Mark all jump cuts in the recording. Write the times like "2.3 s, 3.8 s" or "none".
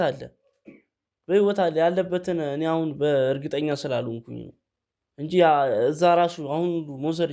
none